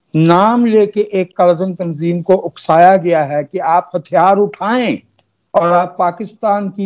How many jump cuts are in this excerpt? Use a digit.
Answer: 0